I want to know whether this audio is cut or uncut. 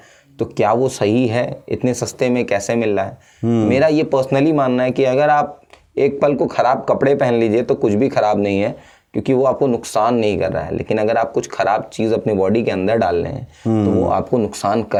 uncut